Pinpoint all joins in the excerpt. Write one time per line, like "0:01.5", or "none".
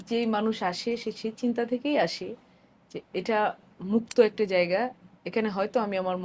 none